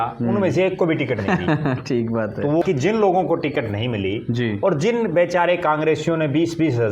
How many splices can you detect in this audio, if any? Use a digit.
1